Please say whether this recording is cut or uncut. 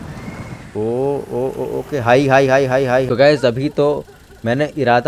cut